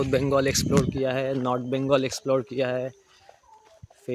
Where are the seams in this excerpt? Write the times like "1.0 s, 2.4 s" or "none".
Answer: none